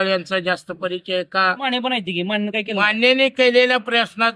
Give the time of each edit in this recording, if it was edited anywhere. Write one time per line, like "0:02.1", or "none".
0:01.6